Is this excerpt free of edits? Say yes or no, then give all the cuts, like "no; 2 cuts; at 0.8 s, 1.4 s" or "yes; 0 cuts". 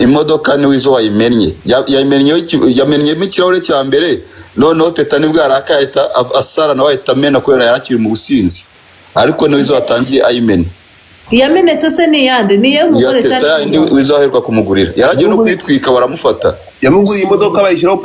yes; 0 cuts